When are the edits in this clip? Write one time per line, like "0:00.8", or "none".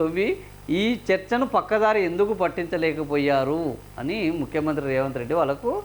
none